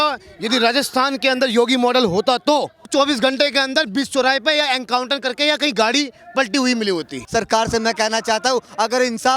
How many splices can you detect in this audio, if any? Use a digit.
2